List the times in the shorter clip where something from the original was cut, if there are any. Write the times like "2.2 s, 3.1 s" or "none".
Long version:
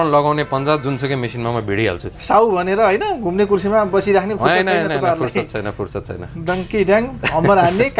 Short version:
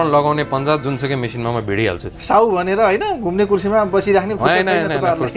none